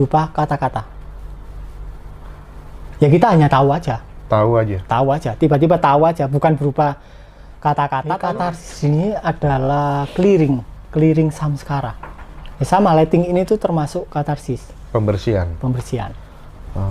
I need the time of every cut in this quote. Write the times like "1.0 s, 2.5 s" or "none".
8.3 s